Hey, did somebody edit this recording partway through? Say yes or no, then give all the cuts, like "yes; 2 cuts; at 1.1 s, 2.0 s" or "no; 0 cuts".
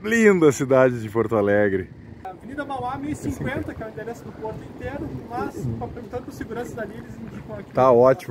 yes; 1 cut; at 2.3 s